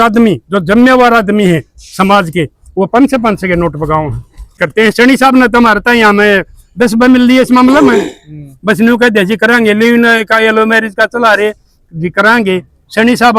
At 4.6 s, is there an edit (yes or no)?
yes